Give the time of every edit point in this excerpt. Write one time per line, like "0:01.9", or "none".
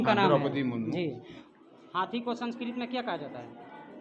0:01.2